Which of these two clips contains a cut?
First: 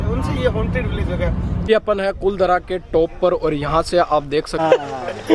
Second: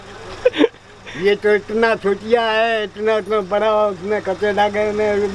first; 2 cuts; at 1.7 s, 4.6 s

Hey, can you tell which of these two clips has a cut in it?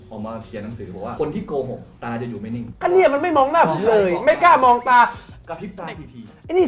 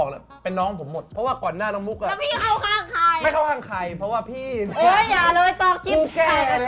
first; 1 cut; at 5.2 s

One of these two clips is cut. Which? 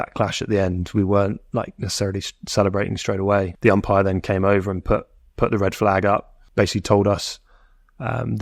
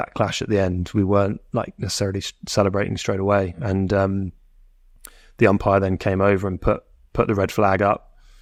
first; 2 cuts; at 3.5 s, 6.4 s

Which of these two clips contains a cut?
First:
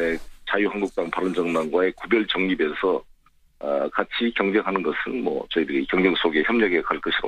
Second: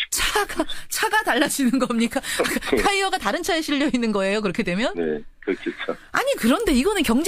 first; 1 cut; at 5.1 s

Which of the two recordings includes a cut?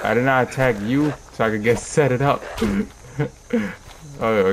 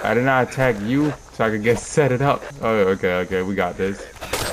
second; 1 cut; at 2.5 s

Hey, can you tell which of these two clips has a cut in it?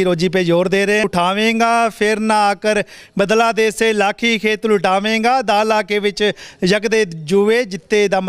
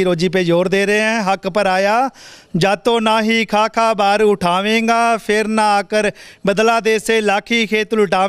first; 1 cut; at 1.0 s

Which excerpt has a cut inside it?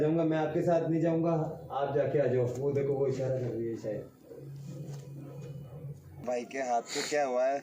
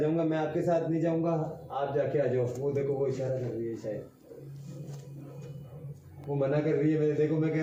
first; 1 cut; at 6.2 s

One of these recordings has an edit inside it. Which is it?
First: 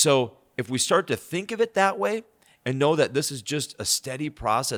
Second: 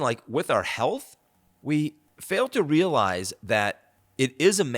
second; 1 cut; at 2.1 s

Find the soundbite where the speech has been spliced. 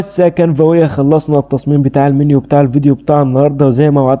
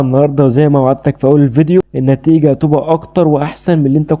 second; 1 cut; at 1.9 s

